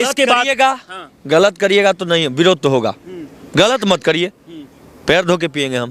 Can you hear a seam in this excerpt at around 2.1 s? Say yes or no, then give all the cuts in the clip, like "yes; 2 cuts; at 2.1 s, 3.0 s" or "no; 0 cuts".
no; 0 cuts